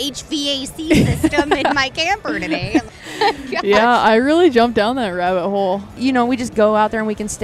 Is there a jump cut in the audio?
yes; 2 cuts; at 2.8 s, 6.0 s

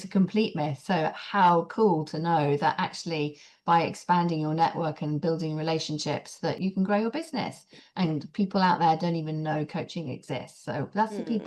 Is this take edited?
yes; 1 cut; at 6.6 s

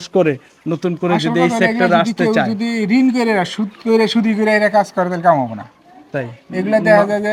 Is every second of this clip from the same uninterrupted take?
yes; 0 cuts

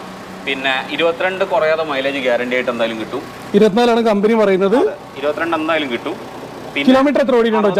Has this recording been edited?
no; 0 cuts

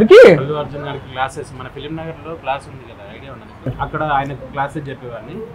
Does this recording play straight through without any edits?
no; 1 cut; at 3.8 s

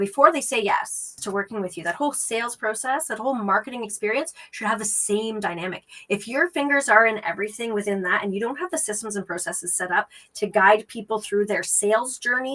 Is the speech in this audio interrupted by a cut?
yes; 1 cut; at 1.2 s

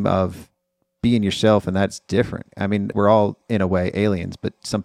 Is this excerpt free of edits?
no; 1 cut; at 2.7 s

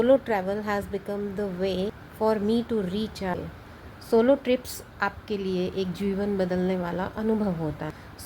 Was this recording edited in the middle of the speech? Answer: yes; 1 cut; at 3.3 s

